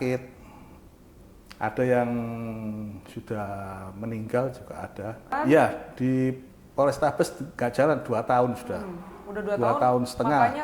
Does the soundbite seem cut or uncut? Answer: cut